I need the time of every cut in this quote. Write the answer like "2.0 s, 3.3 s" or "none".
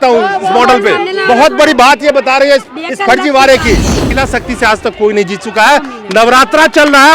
4.2 s